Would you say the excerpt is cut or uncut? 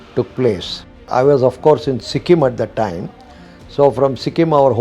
cut